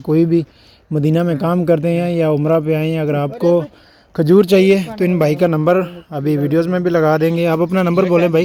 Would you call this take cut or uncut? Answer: uncut